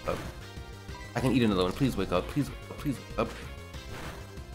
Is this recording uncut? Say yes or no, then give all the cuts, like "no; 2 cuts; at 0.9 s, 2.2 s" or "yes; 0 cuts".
yes; 0 cuts